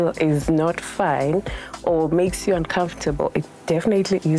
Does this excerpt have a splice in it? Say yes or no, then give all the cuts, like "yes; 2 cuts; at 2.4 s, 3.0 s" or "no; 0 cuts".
no; 0 cuts